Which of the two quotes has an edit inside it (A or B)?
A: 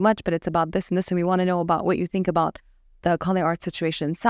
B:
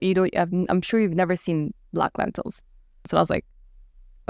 B